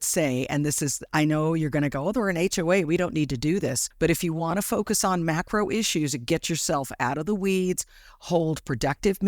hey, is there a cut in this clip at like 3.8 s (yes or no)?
yes